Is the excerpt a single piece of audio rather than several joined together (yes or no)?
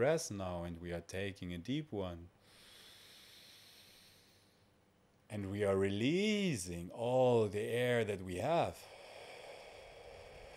yes